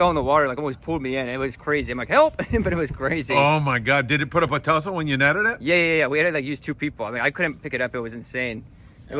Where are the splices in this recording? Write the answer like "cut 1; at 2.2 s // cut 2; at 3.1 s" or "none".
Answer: none